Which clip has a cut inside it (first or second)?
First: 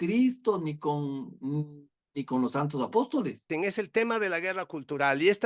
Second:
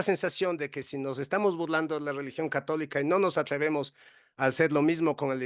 first